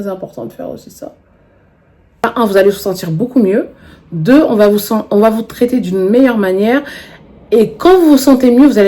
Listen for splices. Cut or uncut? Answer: cut